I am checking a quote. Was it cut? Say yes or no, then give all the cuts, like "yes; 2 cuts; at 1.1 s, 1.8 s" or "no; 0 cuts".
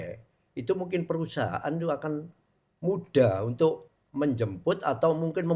no; 0 cuts